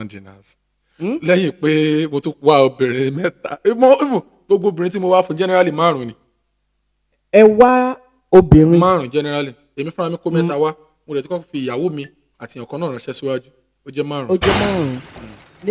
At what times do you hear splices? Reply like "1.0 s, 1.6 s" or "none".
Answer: none